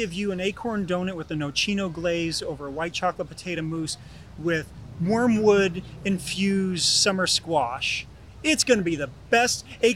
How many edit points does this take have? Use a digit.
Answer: 0